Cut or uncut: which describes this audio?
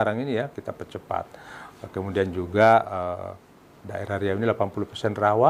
uncut